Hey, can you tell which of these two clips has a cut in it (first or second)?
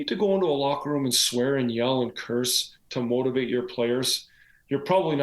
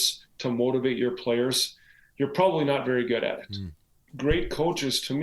second